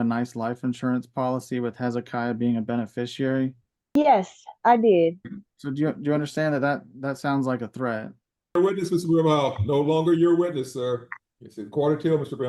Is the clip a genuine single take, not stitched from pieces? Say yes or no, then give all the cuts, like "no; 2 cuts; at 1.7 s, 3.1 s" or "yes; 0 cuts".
no; 2 cuts; at 3.7 s, 8.5 s